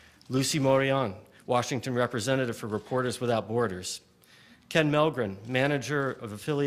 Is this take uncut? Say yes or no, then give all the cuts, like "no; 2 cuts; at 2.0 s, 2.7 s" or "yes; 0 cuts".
yes; 0 cuts